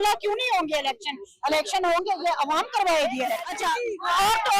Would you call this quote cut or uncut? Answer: cut